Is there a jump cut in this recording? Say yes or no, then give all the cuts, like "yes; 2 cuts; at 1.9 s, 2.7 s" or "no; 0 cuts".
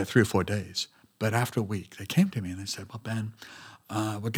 no; 0 cuts